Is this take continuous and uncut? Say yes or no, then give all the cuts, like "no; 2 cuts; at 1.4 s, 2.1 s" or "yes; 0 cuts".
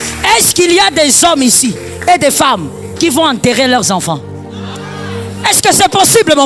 no; 1 cut; at 4.7 s